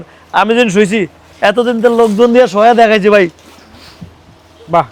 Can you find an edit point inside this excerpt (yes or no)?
no